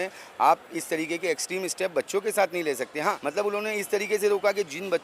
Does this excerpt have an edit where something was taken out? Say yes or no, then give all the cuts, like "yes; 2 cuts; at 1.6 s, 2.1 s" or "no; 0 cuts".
yes; 1 cut; at 3.2 s